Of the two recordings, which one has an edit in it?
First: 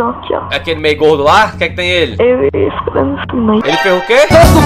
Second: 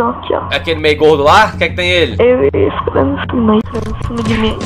second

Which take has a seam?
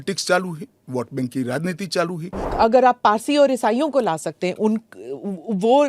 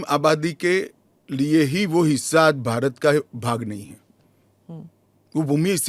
first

